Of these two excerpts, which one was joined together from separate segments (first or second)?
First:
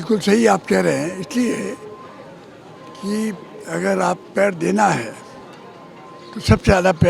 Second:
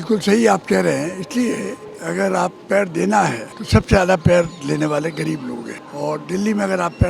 second